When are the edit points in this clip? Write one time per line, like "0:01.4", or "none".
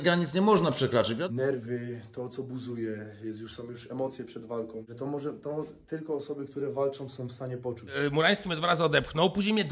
0:01.2
0:07.9